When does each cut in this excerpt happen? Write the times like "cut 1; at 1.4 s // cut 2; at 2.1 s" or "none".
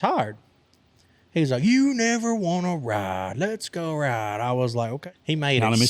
cut 1; at 5.0 s